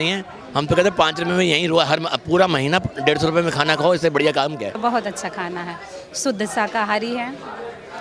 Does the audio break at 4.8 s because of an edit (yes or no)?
yes